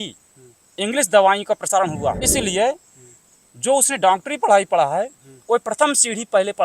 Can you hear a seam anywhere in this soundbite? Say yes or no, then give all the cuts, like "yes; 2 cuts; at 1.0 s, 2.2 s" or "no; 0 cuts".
yes; 1 cut; at 2.2 s